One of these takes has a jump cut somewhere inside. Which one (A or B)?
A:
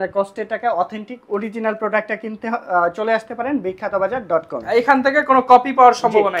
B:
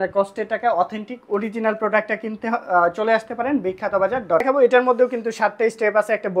B